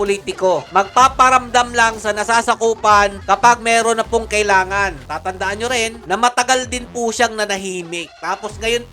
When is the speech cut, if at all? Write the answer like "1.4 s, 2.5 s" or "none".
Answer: 5.1 s